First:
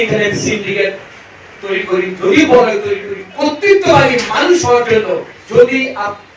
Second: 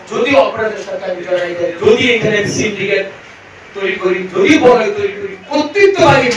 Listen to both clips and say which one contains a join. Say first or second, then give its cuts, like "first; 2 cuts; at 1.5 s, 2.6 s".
first; 1 cut; at 5.3 s